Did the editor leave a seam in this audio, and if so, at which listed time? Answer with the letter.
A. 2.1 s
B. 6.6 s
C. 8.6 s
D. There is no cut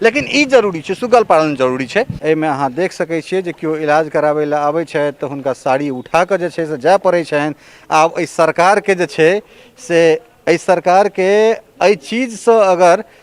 A